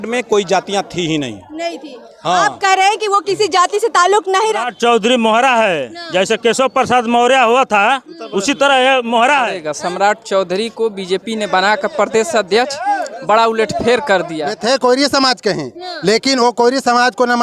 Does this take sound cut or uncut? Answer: cut